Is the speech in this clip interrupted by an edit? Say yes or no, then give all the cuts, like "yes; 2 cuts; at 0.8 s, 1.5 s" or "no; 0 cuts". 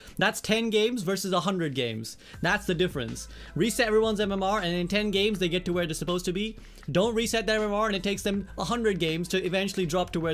no; 0 cuts